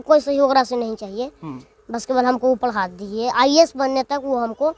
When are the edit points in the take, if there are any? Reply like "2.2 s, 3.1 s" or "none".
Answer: none